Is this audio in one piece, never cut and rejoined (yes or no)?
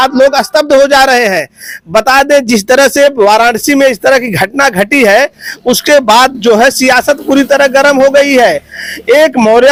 yes